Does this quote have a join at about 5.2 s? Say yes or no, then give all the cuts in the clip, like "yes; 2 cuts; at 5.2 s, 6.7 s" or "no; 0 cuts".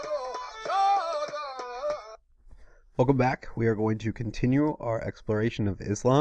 no; 0 cuts